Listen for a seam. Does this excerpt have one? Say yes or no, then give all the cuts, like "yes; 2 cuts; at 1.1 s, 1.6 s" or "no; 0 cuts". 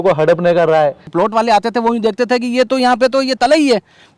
yes; 1 cut; at 1.1 s